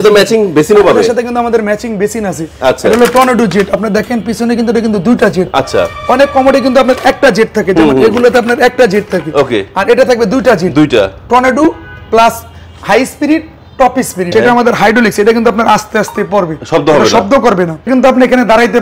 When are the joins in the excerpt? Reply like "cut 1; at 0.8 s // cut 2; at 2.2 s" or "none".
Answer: cut 1; at 14.3 s // cut 2; at 17.9 s